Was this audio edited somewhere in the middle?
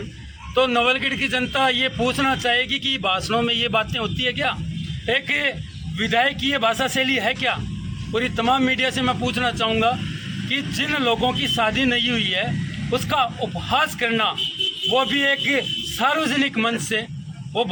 no; 0 cuts

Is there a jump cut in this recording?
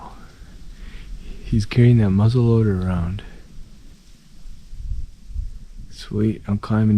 yes; 1 cut; at 3.9 s

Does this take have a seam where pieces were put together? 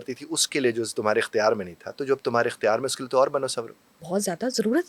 no; 0 cuts

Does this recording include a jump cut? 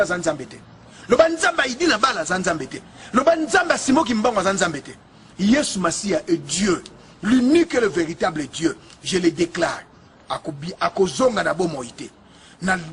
no; 0 cuts

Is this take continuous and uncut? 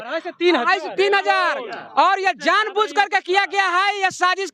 yes; 0 cuts

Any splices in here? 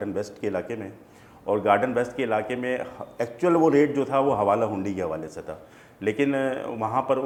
no; 0 cuts

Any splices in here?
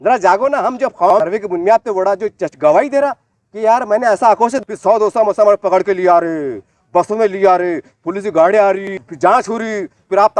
yes; 3 cuts; at 1.2 s, 4.6 s, 9.1 s

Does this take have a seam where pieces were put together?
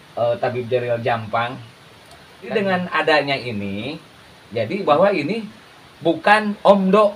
yes; 1 cut; at 2.5 s

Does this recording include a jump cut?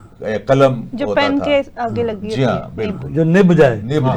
no; 0 cuts

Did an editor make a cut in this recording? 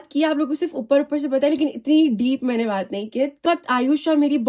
yes; 1 cut; at 3.4 s

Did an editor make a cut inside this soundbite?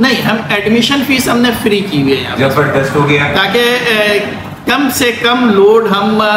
no; 0 cuts

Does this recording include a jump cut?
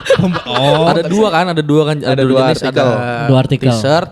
yes; 1 cut; at 0.9 s

